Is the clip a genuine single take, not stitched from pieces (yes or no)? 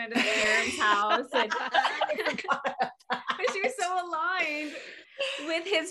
yes